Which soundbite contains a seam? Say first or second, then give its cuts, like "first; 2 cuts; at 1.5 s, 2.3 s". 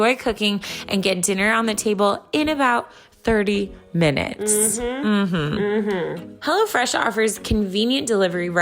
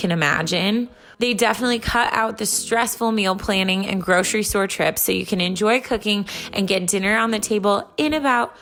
first; 1 cut; at 6.3 s